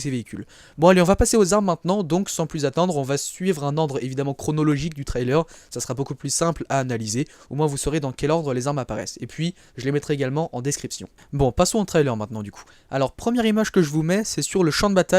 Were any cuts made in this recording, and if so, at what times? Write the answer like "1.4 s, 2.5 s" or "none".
11.9 s